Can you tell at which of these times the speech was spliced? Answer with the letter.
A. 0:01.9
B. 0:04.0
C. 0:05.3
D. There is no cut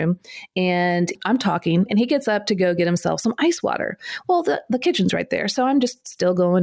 A